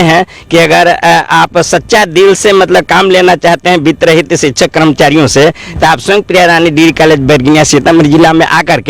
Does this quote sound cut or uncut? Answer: uncut